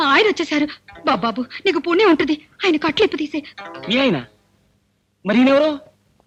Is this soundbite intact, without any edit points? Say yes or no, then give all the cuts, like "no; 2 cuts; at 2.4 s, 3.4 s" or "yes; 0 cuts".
yes; 0 cuts